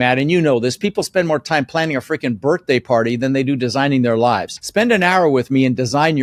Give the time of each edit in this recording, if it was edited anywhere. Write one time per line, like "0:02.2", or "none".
none

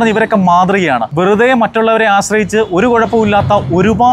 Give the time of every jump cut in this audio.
0:01.1

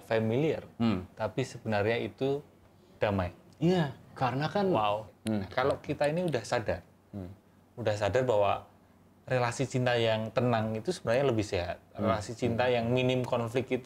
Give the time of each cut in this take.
0:05.1

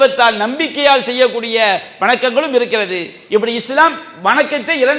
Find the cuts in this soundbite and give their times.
none

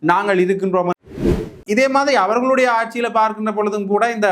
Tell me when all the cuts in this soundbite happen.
0:01.4

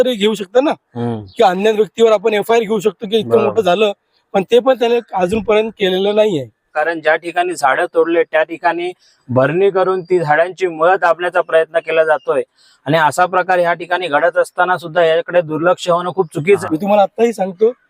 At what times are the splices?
0:06.8
0:16.6

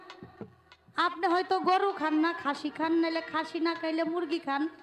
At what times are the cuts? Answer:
none

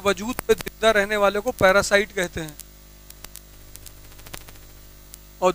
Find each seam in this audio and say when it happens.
none

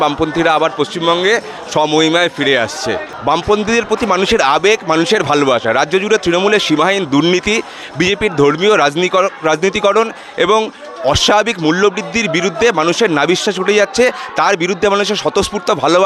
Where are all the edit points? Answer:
0:03.1

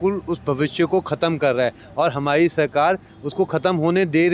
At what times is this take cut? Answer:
none

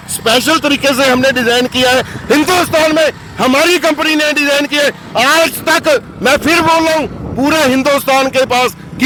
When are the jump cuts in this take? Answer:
none

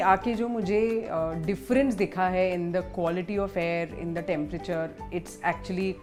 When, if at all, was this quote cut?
none

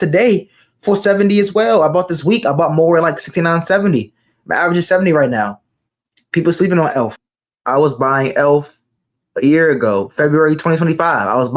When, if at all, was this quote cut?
0:07.2

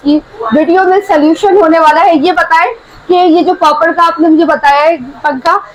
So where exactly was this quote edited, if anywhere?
none

